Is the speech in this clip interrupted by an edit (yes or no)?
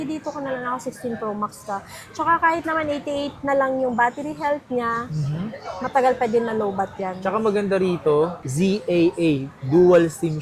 no